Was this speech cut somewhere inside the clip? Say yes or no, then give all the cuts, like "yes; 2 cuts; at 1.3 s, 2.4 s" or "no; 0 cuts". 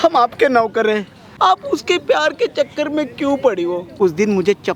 yes; 2 cuts; at 1.2 s, 3.9 s